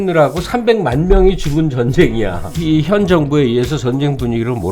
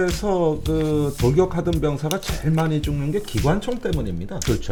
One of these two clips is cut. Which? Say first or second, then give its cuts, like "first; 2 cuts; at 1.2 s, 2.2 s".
first; 1 cut; at 2.5 s